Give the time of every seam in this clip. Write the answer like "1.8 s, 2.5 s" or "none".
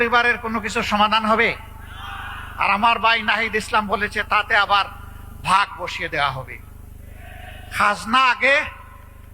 none